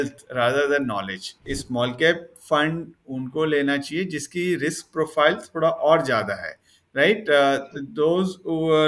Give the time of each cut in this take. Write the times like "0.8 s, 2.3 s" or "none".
1.5 s